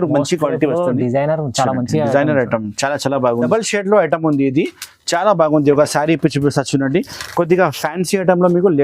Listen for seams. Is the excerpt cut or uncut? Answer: cut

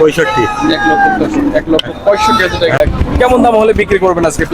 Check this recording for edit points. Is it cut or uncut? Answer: cut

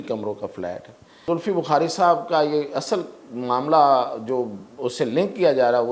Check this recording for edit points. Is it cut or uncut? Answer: cut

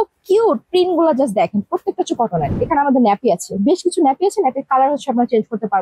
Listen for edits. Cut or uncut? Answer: cut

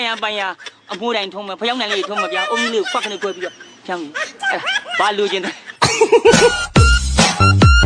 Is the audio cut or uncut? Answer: cut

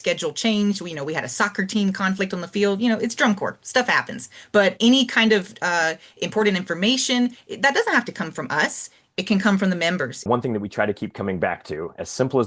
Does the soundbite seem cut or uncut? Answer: cut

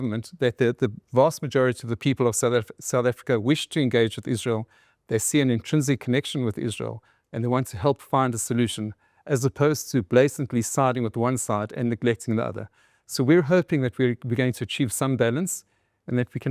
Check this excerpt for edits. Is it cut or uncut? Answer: uncut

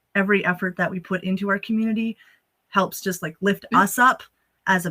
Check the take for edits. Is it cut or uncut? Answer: uncut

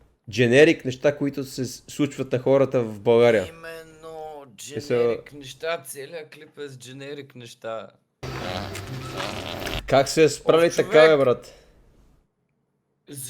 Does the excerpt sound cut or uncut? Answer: cut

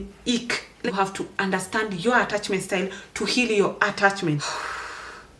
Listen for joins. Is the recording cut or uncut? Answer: cut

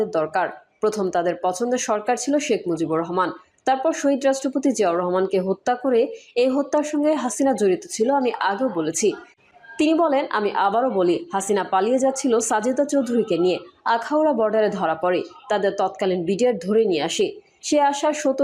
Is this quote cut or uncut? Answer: uncut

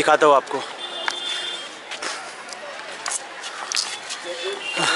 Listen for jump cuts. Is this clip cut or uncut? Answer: uncut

